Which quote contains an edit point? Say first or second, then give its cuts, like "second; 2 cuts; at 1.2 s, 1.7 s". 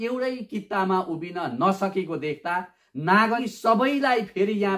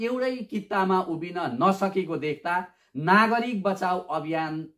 first; 1 cut; at 3.4 s